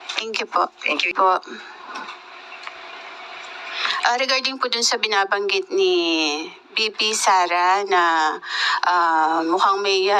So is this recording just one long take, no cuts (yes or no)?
no